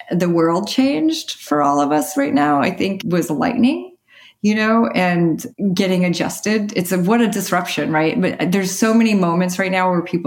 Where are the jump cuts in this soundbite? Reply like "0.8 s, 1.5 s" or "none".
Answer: 1.4 s, 3.0 s, 5.5 s